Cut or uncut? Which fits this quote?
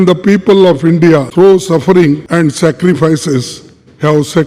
cut